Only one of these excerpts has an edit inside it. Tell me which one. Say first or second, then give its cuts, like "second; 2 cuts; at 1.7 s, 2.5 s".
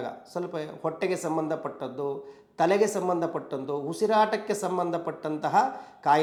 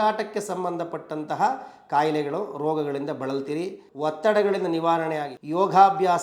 second; 2 cuts; at 3.8 s, 5.3 s